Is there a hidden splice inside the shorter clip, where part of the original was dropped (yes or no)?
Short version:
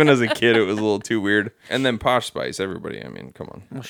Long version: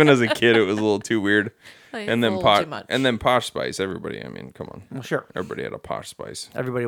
yes